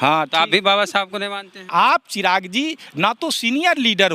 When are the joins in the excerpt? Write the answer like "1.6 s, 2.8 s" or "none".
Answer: 1.7 s